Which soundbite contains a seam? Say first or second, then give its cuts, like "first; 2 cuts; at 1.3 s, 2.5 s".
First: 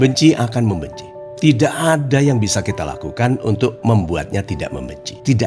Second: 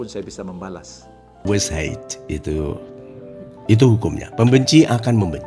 second; 2 cuts; at 1.5 s, 2.9 s